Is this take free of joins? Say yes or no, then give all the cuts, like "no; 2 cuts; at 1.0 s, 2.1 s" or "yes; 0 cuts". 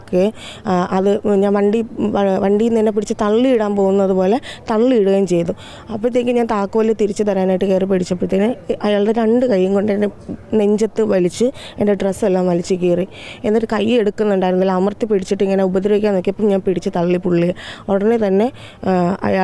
yes; 0 cuts